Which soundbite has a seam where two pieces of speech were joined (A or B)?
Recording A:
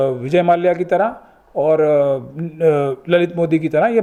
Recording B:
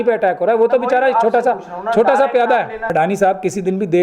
B